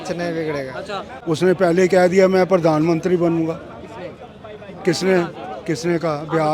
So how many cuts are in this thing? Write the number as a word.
one